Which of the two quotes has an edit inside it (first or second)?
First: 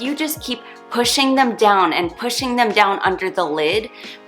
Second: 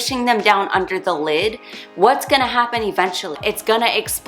second